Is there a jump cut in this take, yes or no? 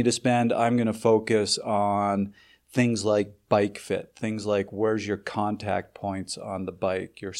no